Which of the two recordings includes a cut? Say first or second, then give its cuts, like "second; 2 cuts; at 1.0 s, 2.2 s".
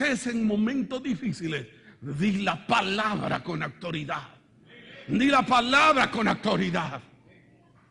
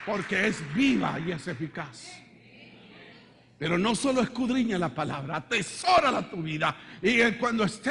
first; 1 cut; at 4.8 s